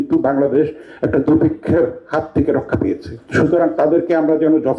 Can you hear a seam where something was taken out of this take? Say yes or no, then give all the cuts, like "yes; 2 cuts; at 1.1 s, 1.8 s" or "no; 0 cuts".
yes; 1 cut; at 3.1 s